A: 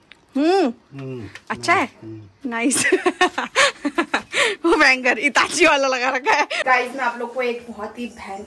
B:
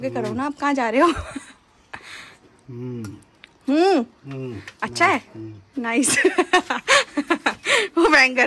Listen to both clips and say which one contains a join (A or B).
A